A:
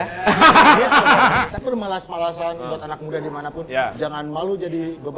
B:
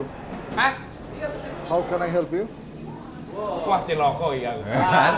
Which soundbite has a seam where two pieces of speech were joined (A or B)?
A